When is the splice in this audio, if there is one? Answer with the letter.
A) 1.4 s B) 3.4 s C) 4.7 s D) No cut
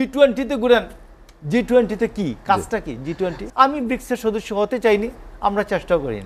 B